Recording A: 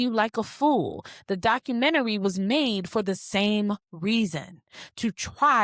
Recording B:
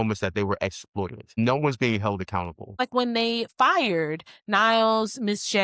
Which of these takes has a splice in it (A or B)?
B